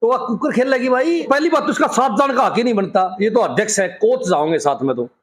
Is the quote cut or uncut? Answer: cut